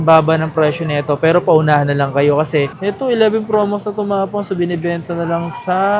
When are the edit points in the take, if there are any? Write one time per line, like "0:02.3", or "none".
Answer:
0:02.7